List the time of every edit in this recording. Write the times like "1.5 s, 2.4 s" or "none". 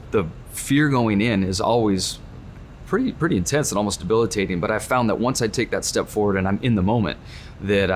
none

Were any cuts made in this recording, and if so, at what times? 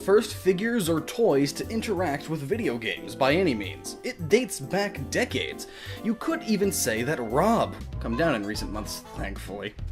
none

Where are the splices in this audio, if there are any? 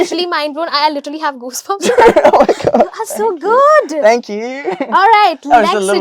none

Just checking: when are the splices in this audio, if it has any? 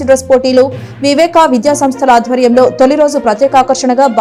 none

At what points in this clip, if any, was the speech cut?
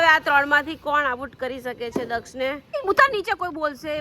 2.6 s

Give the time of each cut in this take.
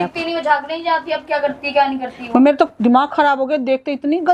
none

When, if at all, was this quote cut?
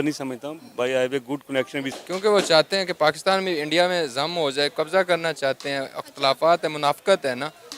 1.9 s

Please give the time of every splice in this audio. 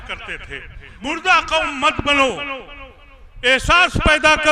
1.0 s

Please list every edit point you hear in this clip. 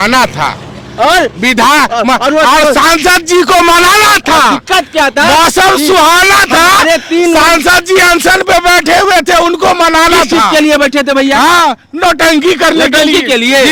none

